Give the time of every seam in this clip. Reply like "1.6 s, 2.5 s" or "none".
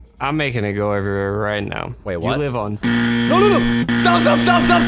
none